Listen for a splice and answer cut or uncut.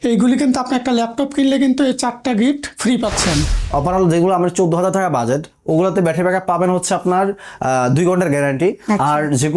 cut